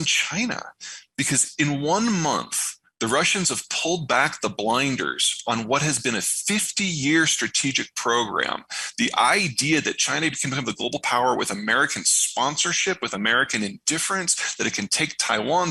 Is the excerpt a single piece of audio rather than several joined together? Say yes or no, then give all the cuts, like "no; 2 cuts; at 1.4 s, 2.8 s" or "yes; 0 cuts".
yes; 0 cuts